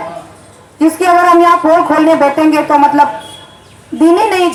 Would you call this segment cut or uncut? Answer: uncut